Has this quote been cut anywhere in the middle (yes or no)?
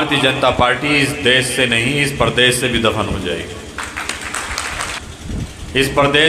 yes